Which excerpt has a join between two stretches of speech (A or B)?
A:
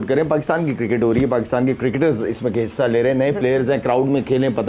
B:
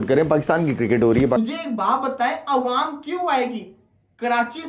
B